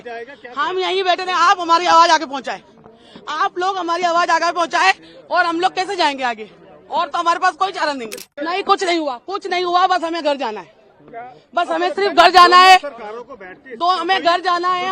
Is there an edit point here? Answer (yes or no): yes